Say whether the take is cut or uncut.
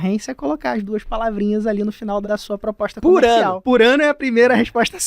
cut